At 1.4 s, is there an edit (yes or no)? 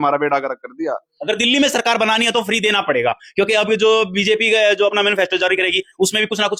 no